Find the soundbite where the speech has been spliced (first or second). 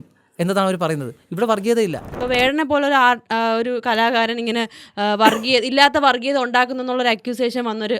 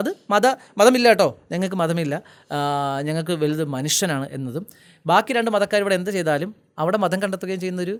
first